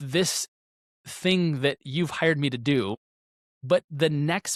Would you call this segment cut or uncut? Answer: uncut